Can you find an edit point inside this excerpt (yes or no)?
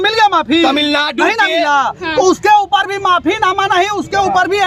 no